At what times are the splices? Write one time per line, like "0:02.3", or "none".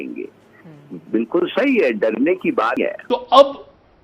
0:02.8